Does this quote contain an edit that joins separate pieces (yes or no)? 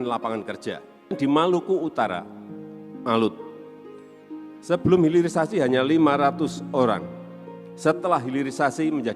yes